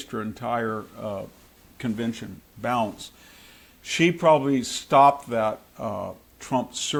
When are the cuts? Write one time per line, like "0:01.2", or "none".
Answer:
none